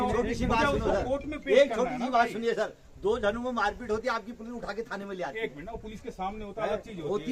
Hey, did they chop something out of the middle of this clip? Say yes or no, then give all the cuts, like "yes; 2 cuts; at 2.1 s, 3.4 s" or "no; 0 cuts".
no; 0 cuts